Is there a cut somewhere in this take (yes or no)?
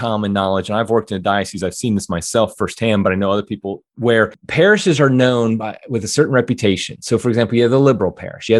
yes